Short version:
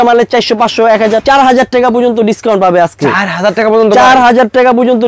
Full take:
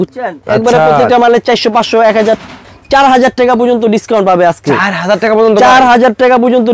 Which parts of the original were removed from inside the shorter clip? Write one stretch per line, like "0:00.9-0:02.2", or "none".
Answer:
0:02.4-0:02.9